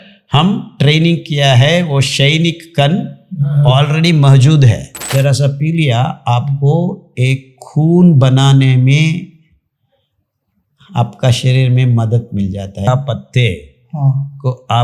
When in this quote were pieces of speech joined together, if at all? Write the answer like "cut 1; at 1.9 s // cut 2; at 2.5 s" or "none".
cut 1; at 4.9 s // cut 2; at 12.9 s